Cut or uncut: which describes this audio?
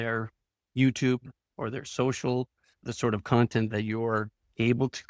cut